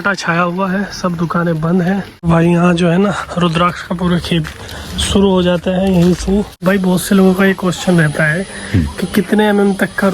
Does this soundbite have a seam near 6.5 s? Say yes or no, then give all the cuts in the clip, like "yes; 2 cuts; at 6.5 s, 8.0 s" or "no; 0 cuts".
yes; 2 cuts; at 2.2 s, 6.5 s